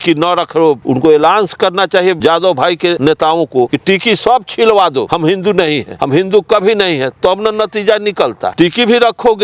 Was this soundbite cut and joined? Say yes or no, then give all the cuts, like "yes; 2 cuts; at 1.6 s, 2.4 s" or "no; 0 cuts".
yes; 7 cuts; at 0.8 s, 2.2 s, 3.0 s, 3.7 s, 5.1 s, 5.9 s, 8.5 s